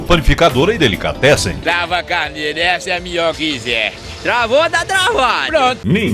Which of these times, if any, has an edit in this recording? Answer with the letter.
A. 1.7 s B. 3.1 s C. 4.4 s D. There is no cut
A